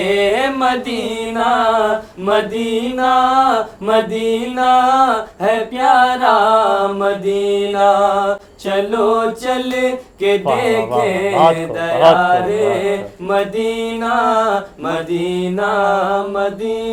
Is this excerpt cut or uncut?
uncut